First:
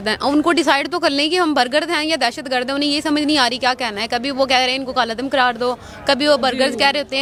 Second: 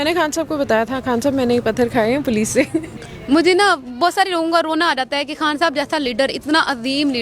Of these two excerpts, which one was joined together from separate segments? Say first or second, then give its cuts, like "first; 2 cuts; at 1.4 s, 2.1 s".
second; 1 cut; at 3.0 s